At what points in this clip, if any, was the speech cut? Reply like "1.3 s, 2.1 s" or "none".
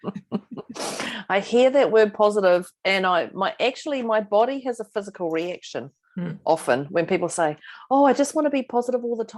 none